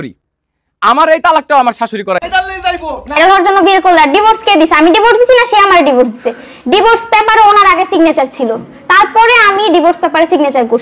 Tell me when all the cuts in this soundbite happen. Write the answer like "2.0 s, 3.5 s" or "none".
3.2 s